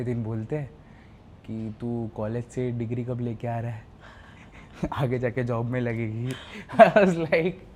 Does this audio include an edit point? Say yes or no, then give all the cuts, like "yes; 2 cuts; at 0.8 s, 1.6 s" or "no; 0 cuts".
no; 0 cuts